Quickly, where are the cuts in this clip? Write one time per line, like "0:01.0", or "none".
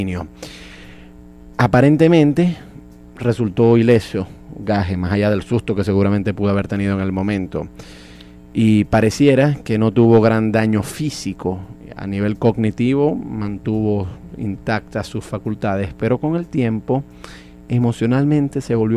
none